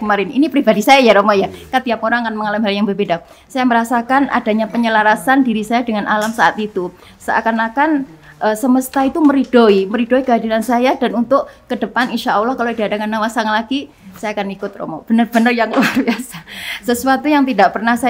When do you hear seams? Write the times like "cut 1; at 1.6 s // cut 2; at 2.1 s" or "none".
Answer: none